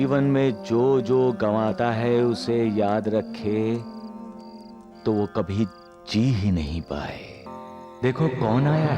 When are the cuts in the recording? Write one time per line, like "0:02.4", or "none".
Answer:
0:07.4